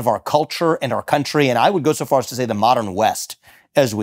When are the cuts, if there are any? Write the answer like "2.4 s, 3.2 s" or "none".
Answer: none